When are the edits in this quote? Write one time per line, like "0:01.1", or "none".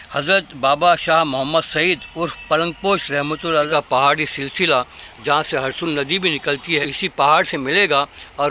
0:03.7
0:06.9

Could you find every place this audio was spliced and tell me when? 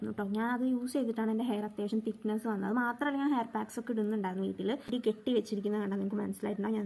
0:04.9

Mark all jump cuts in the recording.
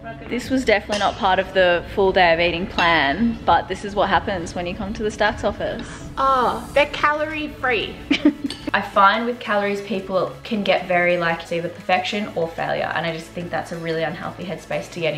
0:08.6
0:11.4

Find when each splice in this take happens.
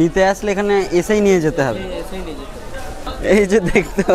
0:03.0

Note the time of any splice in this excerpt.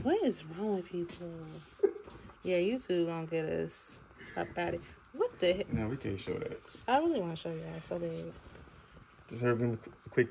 none

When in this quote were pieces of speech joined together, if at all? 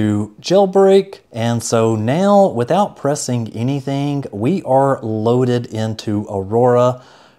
0:01.2

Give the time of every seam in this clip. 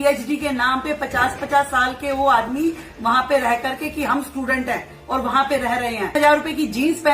0:06.1

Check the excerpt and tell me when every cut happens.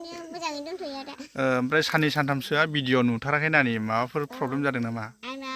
none

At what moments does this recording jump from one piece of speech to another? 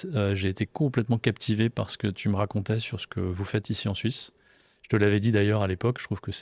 none

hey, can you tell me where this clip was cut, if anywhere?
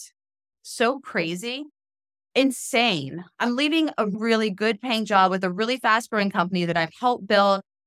none

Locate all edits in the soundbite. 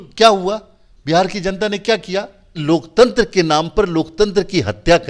0:02.6

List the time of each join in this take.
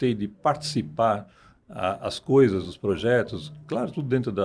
none

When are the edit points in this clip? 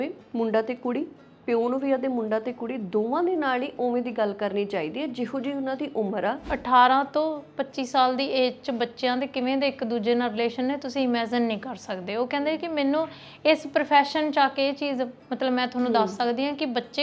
0:06.5

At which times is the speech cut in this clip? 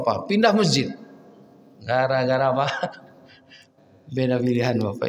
none

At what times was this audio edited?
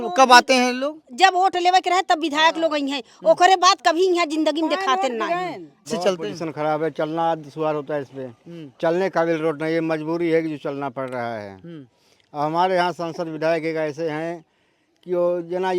0:05.9

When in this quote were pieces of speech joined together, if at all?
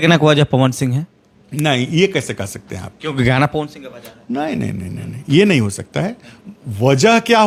none

